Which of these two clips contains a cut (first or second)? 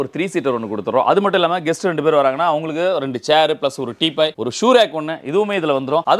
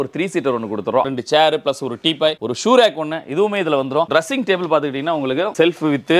second